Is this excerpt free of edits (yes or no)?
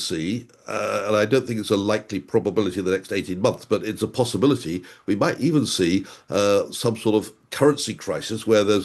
yes